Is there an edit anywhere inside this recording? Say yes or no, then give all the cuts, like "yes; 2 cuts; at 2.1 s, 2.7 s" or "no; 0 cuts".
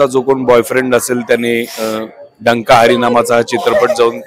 no; 0 cuts